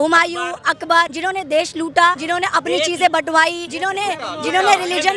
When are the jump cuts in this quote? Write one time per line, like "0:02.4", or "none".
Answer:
0:01.1
0:02.2
0:03.7